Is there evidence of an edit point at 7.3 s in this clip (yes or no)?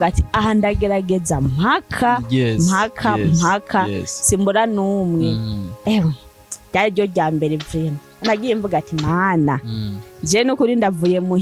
no